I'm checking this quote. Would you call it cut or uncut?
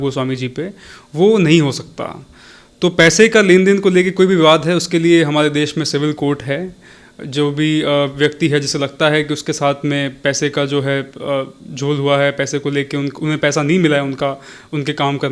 uncut